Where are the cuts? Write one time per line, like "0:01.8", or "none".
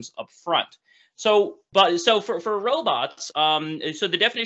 0:01.6

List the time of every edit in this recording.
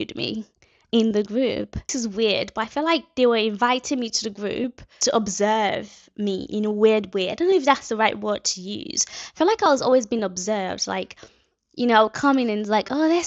0:01.9
0:04.9

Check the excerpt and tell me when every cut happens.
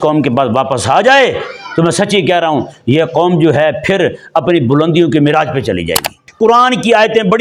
0:06.2

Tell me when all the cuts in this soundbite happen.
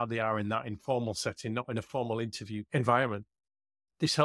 0:02.6

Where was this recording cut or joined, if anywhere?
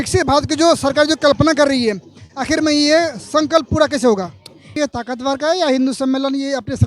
0:04.8

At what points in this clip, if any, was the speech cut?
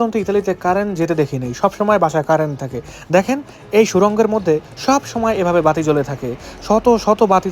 none

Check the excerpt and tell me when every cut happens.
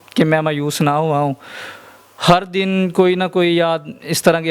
none

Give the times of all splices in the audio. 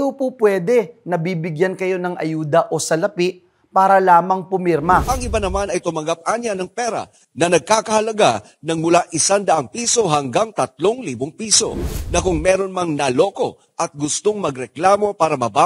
0:05.0
0:11.9

